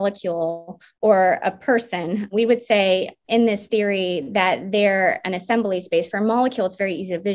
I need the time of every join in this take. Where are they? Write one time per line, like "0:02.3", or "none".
0:02.3
0:03.2